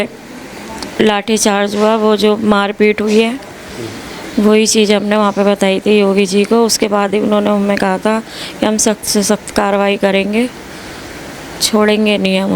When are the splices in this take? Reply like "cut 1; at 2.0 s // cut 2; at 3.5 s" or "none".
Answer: none